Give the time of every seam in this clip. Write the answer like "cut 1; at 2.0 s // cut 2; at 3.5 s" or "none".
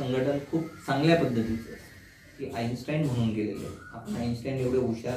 cut 1; at 2.3 s